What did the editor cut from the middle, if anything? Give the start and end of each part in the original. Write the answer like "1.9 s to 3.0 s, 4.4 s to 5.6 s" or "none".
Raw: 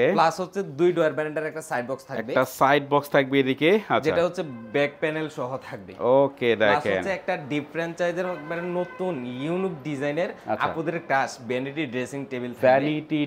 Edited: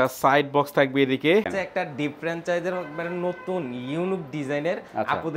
3.9 s to 7.0 s